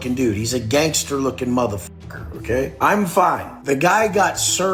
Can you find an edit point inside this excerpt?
no; 0 cuts

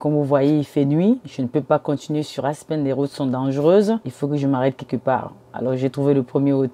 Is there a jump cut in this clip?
yes; 1 cut; at 4.1 s

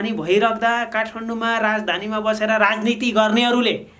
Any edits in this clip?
no; 0 cuts

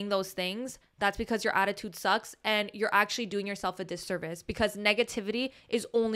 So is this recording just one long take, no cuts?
yes; 0 cuts

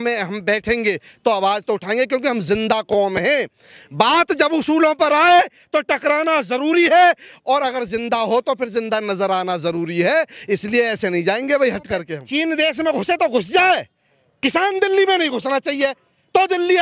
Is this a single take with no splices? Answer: no; 1 cut; at 12.2 s

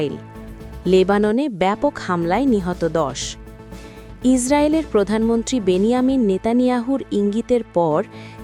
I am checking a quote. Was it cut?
no; 0 cuts

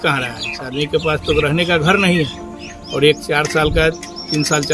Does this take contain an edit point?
no; 0 cuts

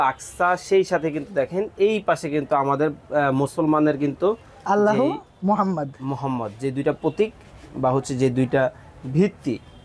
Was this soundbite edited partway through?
no; 0 cuts

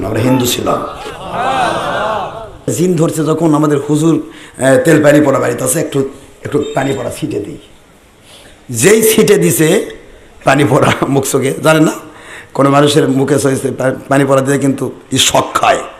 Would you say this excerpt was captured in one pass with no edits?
no; 1 cut; at 2.7 s

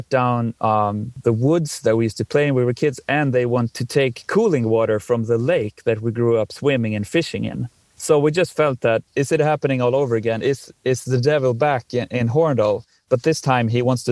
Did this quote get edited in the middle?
yes; 4 cuts; at 1.1 s, 3.7 s, 7.8 s, 9.1 s

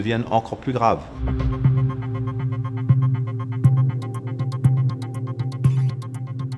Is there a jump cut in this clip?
yes; 2 cuts; at 1.1 s, 4.2 s

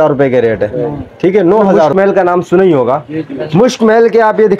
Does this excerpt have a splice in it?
yes; 1 cut; at 1.9 s

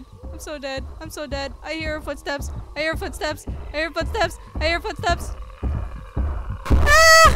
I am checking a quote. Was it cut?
no; 0 cuts

